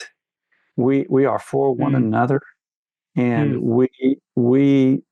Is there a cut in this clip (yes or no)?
no